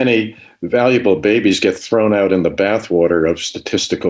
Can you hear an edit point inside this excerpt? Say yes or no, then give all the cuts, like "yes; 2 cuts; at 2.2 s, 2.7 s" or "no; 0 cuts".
no; 0 cuts